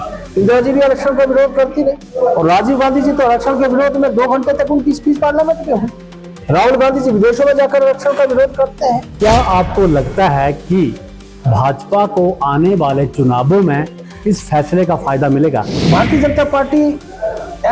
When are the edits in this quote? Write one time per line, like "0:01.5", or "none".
0:09.1
0:15.8